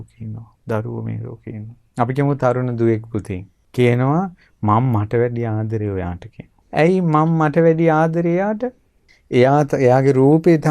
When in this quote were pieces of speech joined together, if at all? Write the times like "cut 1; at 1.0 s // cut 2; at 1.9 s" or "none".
cut 1; at 1.8 s